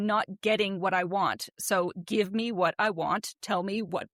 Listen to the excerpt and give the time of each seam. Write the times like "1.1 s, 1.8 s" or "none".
none